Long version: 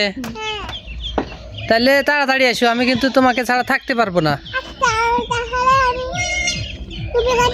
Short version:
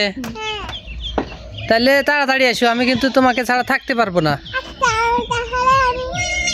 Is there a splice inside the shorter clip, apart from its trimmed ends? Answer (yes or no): no